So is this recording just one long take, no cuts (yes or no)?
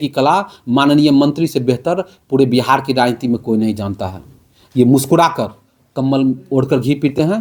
yes